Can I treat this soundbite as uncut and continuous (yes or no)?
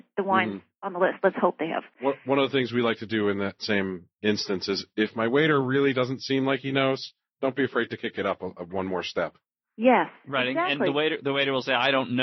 yes